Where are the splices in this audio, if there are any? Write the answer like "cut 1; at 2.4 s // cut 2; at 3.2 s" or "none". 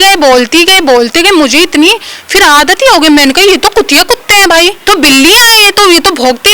cut 1; at 4.8 s